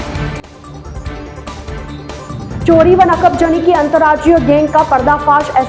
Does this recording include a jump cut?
yes; 1 cut; at 2.2 s

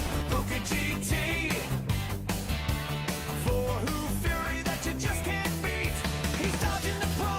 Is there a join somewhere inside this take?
no; 0 cuts

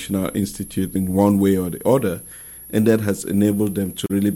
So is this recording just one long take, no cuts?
no; 1 cut; at 0.9 s

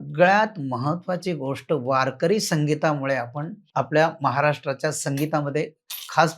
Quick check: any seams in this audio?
yes; 1 cut; at 3.6 s

